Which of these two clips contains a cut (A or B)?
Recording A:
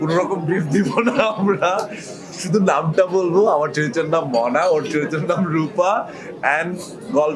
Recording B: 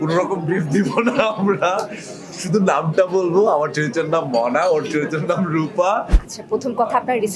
B